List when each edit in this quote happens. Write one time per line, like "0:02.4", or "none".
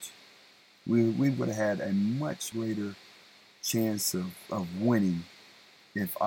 0:02.5